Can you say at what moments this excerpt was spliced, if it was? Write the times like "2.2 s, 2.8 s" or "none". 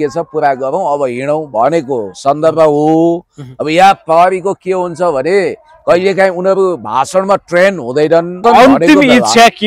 8.4 s